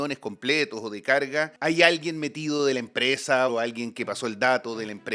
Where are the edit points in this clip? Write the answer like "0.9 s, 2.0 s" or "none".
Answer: 1.5 s, 3.5 s